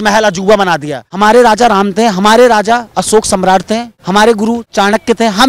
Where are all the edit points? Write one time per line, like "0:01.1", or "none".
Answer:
0:01.0
0:03.9
0:04.7